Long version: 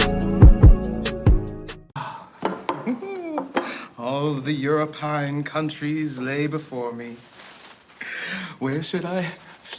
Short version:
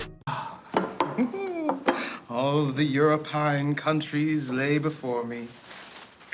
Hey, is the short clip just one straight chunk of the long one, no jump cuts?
yes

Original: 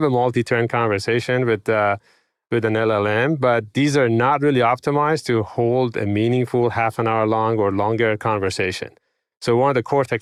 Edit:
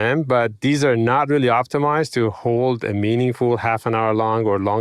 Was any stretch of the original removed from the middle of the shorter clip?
no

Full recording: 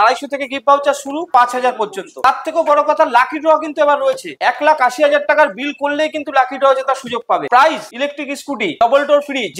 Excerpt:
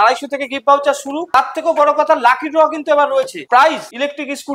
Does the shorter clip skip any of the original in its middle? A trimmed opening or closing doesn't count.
yes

